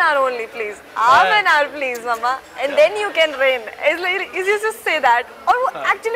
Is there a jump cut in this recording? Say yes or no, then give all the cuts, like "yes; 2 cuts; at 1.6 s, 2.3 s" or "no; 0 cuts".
no; 0 cuts